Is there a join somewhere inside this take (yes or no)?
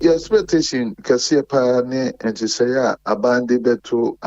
yes